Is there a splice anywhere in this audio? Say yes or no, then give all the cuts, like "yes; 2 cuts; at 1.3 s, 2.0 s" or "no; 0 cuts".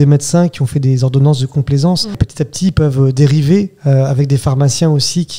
yes; 1 cut; at 2.3 s